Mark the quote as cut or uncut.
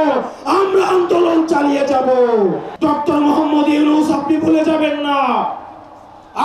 cut